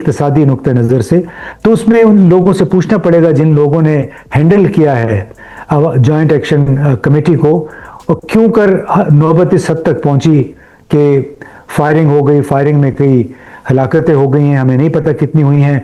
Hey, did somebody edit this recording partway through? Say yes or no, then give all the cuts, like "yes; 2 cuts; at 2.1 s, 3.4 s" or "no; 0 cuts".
no; 0 cuts